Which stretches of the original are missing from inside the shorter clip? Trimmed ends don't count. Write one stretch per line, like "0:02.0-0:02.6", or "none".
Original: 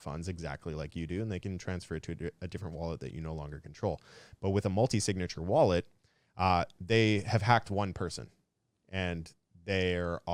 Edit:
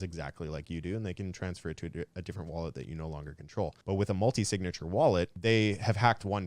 0:04.0-0:04.3
0:05.9-0:06.8